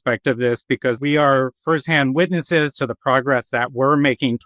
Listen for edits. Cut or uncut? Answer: cut